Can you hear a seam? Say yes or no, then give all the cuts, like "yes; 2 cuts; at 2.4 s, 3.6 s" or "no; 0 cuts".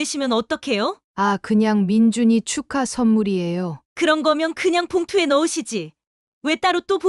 yes; 1 cut; at 1.0 s